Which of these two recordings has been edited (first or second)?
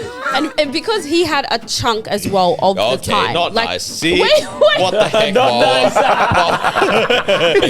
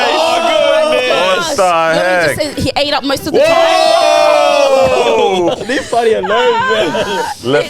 second